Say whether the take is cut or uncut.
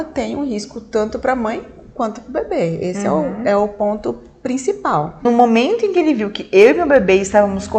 cut